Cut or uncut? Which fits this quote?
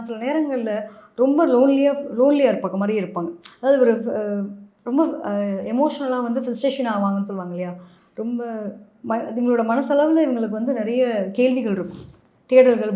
uncut